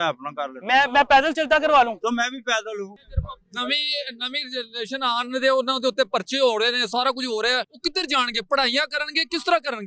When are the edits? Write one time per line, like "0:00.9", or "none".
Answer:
0:02.9
0:07.7